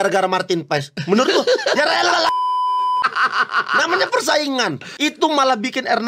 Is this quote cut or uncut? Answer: uncut